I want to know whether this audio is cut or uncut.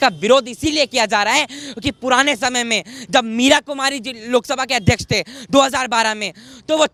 uncut